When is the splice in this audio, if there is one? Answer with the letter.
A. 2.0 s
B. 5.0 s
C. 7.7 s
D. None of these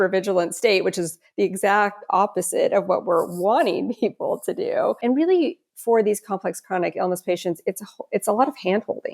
B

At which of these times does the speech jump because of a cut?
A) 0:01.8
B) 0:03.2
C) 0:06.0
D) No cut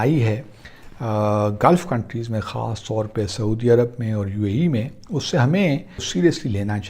C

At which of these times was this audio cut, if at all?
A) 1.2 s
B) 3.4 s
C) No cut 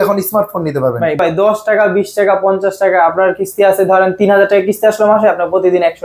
A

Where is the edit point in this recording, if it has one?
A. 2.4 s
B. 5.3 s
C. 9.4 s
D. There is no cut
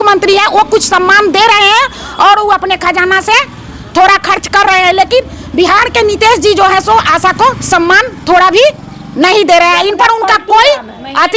D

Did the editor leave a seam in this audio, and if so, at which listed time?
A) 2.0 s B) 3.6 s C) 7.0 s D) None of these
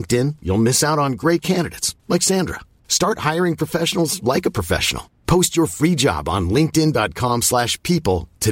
D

